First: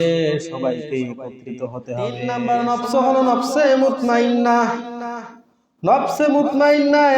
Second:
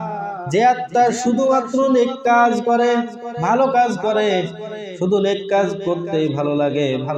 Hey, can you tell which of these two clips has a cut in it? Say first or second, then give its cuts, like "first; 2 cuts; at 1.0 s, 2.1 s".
first; 1 cut; at 1.6 s